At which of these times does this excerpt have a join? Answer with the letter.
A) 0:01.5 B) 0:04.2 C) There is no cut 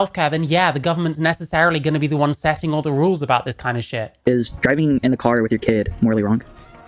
B